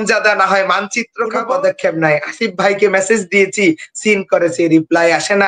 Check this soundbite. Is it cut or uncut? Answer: cut